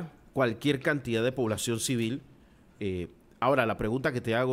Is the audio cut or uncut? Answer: uncut